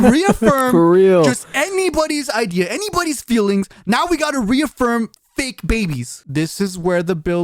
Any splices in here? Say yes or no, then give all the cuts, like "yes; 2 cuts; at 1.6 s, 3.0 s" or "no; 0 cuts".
yes; 1 cut; at 6.1 s